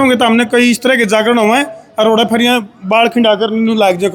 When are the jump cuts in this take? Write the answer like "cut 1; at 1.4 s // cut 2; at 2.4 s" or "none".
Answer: none